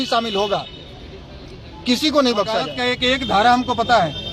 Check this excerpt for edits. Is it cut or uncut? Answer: cut